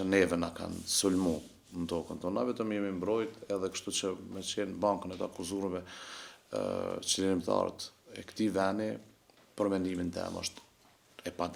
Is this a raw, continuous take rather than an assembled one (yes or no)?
yes